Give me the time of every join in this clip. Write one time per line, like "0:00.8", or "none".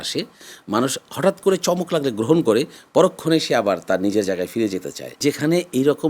0:05.2